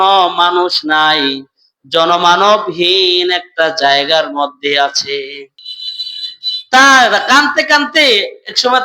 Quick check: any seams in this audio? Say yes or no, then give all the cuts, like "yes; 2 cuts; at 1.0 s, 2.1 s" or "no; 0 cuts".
no; 0 cuts